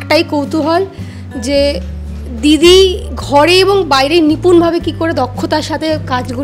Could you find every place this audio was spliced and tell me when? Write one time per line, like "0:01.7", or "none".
none